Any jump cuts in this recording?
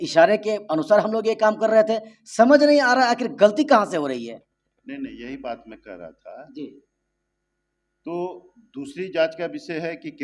no; 0 cuts

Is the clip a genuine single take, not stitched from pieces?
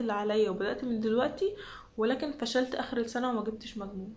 yes; 0 cuts

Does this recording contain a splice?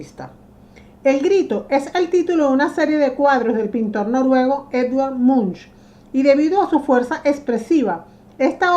yes; 1 cut; at 3.1 s

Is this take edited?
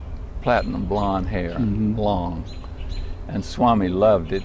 no; 0 cuts

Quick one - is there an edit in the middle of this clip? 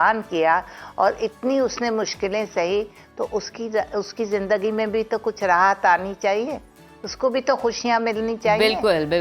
no; 0 cuts

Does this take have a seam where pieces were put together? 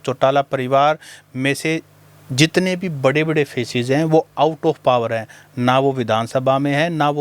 no; 0 cuts

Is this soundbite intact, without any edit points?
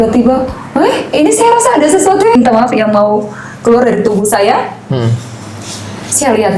no; 1 cut; at 2.3 s

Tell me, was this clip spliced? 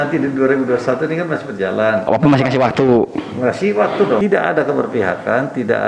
yes; 1 cut; at 4.2 s

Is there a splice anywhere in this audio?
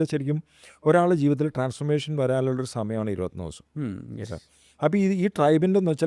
no; 0 cuts

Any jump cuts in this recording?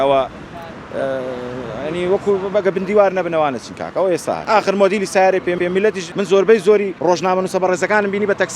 yes; 3 cuts; at 4.4 s, 5.6 s, 6.9 s

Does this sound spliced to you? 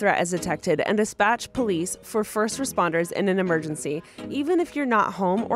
no; 0 cuts

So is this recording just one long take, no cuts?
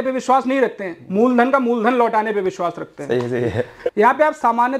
no; 1 cut; at 3.8 s

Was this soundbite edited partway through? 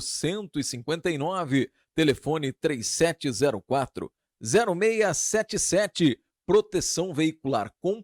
no; 0 cuts

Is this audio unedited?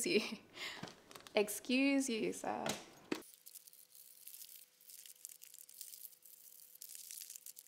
yes; 0 cuts

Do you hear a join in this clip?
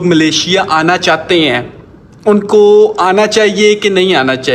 no; 0 cuts

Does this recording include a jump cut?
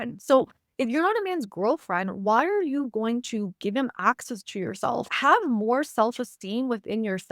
no; 0 cuts

